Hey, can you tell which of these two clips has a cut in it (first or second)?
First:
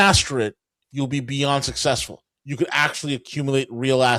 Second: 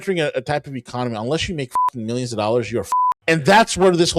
second